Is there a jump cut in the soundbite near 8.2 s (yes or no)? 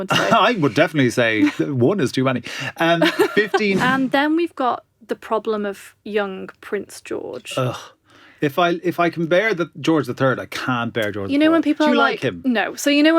no